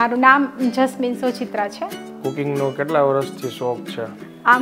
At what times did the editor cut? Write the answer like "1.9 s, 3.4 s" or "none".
2.1 s